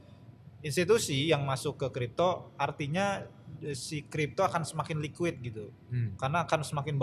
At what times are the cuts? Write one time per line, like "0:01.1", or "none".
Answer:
none